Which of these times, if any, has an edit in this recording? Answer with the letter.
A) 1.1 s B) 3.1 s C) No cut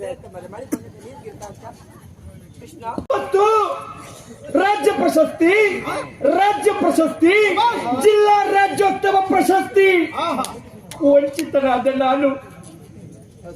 B